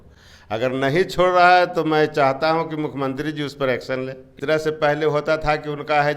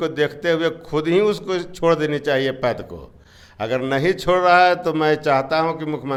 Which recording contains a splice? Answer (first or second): first